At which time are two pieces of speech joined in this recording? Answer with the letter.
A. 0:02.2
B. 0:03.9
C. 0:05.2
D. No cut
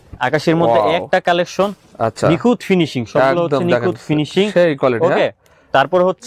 D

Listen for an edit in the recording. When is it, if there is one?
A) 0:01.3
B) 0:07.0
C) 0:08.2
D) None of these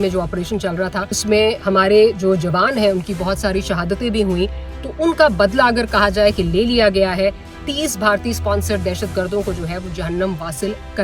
A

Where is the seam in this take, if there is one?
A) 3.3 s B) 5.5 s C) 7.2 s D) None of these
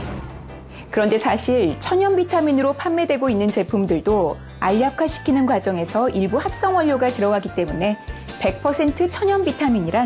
C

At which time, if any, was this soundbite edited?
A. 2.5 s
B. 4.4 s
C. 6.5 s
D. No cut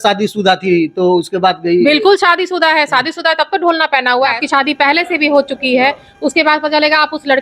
B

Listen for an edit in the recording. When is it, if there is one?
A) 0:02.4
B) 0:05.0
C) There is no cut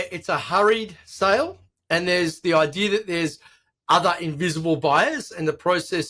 A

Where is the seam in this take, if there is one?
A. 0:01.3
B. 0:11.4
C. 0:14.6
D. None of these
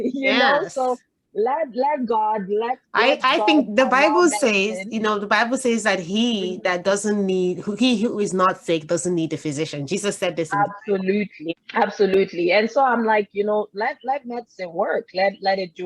B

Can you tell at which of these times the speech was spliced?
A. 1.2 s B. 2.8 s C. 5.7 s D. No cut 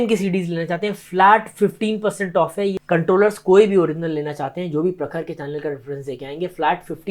B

